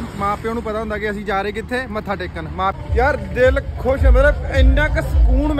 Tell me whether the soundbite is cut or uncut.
cut